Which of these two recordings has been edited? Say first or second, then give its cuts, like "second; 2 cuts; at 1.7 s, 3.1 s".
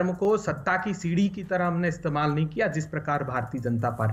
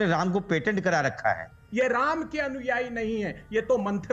second; 1 cut; at 1.6 s